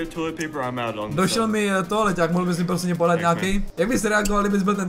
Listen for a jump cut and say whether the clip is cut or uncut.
cut